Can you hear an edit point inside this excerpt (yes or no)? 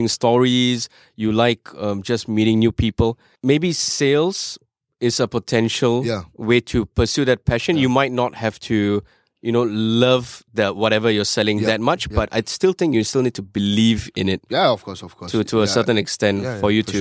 yes